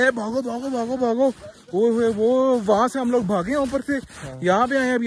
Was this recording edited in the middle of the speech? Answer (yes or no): no